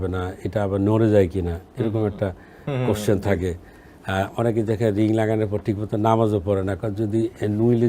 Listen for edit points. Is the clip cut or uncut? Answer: uncut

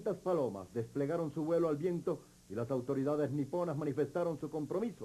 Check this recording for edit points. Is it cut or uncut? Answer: uncut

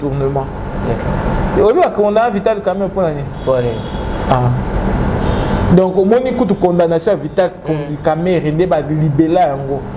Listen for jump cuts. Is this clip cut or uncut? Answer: uncut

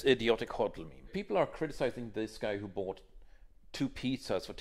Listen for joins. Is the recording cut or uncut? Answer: cut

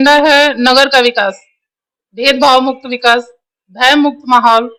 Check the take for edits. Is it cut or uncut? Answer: uncut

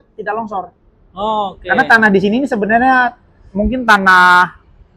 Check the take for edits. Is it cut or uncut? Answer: uncut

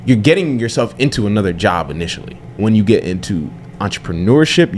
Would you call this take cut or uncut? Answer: cut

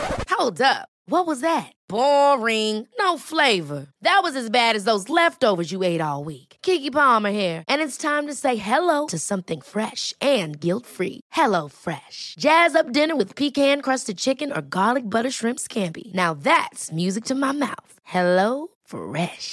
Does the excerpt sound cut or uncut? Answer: uncut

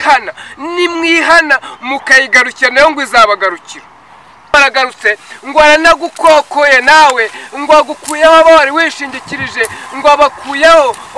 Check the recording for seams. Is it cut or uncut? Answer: cut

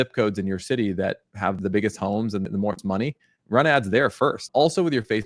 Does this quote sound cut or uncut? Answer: cut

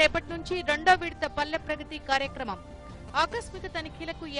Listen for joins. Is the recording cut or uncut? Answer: uncut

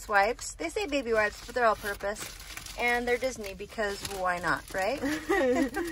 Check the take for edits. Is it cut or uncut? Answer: uncut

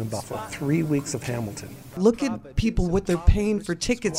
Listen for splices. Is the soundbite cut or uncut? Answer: cut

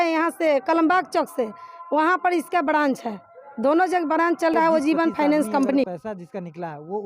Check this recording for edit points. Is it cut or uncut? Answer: cut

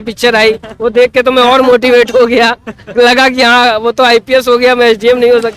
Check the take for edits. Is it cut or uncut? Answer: uncut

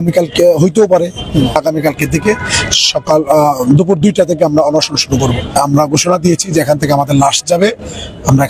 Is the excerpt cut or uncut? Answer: cut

